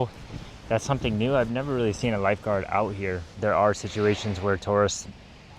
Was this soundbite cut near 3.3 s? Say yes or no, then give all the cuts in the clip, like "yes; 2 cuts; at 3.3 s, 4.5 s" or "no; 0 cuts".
yes; 1 cut; at 3.3 s